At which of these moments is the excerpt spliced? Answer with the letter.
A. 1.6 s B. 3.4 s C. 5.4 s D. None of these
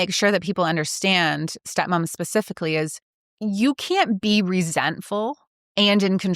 A